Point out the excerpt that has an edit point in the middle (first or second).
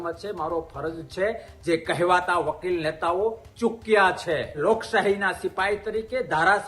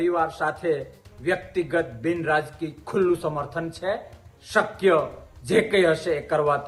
first